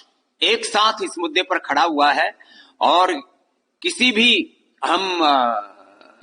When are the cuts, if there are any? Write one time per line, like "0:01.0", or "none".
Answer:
none

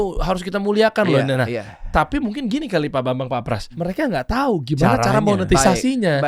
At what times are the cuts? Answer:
0:03.7

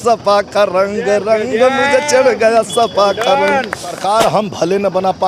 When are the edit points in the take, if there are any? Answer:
0:04.0

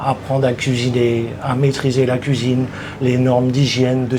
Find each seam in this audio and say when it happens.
none

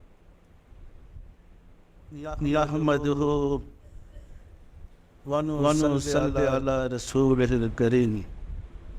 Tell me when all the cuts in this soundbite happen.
0:01.0

